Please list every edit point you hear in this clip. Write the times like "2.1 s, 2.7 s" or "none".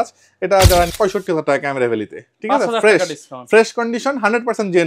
0.9 s